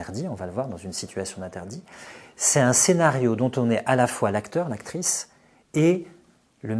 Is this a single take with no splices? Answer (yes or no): yes